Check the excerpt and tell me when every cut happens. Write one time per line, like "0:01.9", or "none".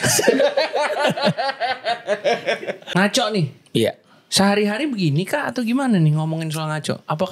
none